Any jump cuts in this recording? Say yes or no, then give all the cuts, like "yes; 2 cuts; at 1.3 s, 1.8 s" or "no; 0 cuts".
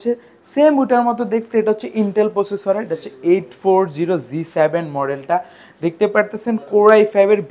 no; 0 cuts